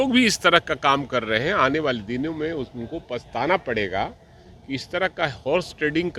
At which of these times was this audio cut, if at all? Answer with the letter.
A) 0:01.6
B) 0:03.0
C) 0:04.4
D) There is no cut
D